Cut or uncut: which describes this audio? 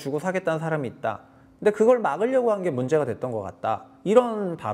uncut